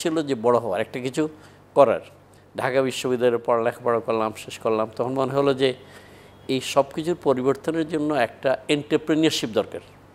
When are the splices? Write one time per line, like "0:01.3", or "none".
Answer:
none

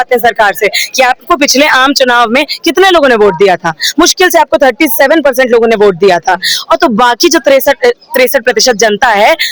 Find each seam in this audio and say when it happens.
none

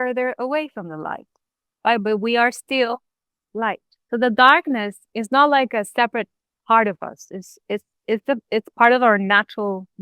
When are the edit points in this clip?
0:03.9
0:05.0

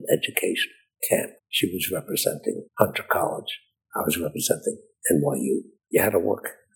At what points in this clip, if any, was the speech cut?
0:01.4
0:02.7
0:05.7

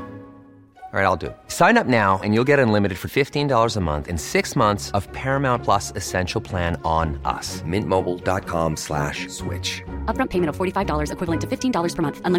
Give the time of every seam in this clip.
none

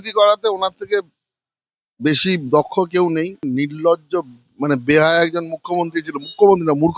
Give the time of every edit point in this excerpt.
0:03.4

